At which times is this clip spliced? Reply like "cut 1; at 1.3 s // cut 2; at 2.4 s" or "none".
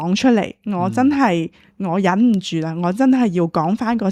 none